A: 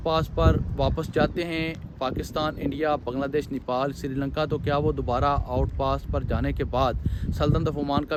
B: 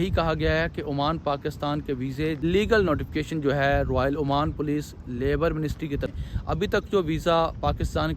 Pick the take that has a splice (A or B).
B